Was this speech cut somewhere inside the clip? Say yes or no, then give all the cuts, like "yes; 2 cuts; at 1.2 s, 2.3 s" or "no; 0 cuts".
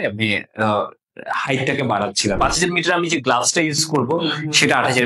yes; 1 cut; at 2.4 s